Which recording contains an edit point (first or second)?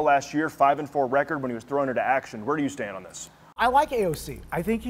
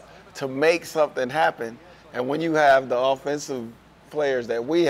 first